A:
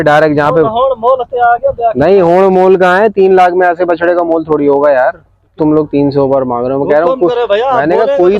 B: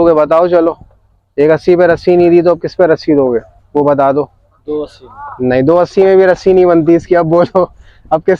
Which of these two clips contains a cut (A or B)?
A